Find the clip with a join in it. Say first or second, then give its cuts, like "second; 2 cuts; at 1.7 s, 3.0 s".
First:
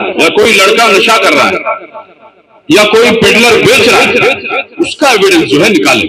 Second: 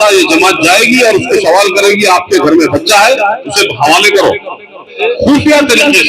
second; 1 cut; at 5.0 s